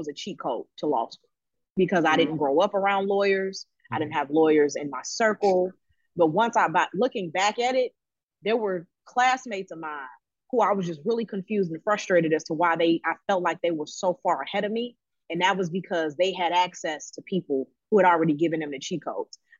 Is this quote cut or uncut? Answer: uncut